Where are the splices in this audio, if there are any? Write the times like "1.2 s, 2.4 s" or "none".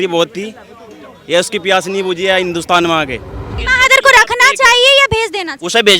3.6 s